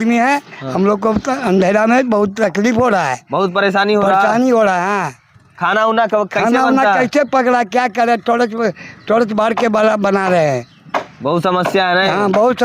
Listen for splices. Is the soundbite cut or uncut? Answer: uncut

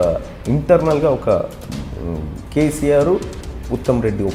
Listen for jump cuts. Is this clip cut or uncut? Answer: uncut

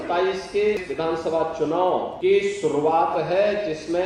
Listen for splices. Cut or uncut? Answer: cut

